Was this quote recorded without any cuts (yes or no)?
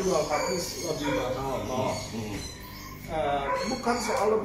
yes